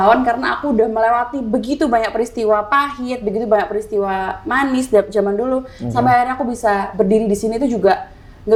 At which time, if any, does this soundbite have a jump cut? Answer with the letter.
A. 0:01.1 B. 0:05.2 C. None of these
C